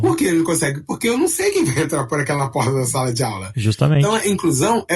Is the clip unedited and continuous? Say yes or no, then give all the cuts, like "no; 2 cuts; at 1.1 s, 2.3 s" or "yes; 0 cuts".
no; 1 cut; at 4.0 s